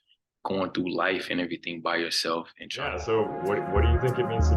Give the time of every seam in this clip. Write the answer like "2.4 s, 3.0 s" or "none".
3.0 s